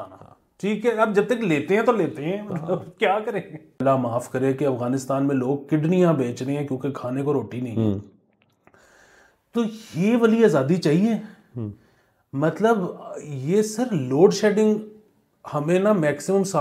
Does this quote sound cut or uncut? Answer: cut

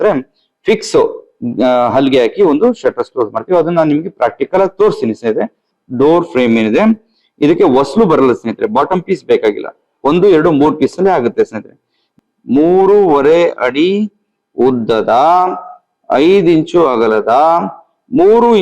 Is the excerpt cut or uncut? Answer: cut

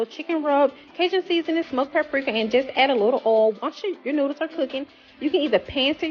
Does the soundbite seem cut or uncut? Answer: uncut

